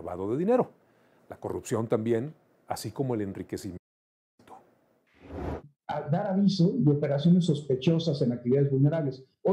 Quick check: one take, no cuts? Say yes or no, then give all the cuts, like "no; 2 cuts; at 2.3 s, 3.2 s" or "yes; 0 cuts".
yes; 0 cuts